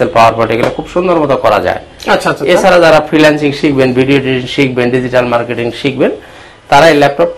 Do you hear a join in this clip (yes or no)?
no